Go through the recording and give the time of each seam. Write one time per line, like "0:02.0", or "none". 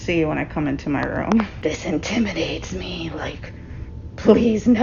0:01.5